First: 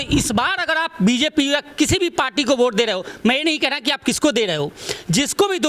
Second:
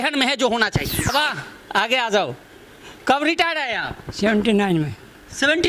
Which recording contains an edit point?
second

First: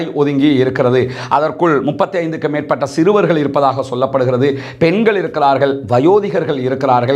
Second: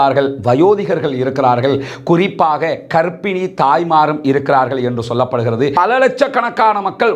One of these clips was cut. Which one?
second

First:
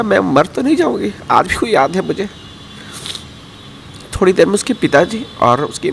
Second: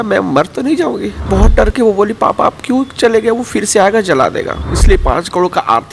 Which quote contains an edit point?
second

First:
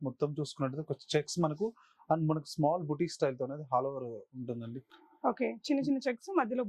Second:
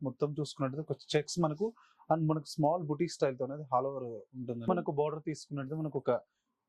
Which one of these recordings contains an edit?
second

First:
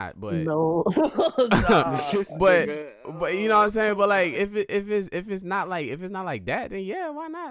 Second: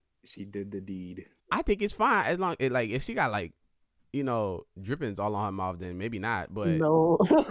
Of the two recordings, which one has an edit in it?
second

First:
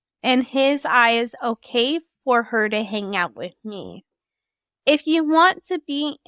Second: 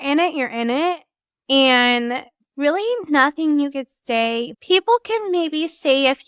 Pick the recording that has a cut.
first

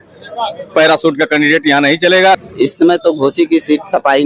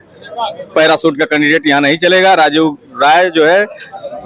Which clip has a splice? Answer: first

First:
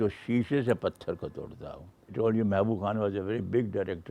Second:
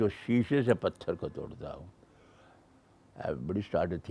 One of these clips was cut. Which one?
first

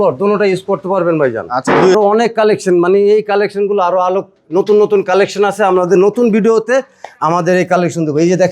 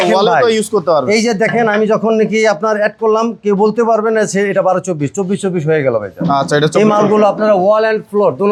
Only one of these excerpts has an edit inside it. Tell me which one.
first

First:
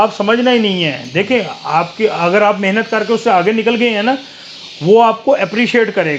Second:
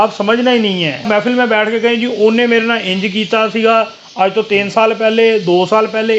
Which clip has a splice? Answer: second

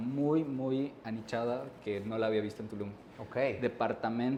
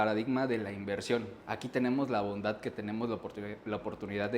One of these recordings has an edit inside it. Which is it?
second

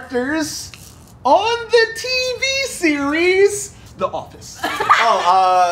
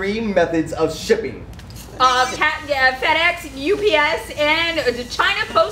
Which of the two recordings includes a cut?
first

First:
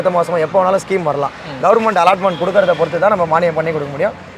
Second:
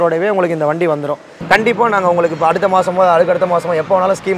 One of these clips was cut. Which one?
second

